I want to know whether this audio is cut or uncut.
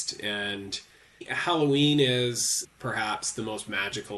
cut